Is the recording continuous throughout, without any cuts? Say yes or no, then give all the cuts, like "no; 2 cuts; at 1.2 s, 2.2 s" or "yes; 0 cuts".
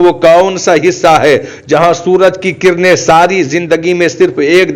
yes; 0 cuts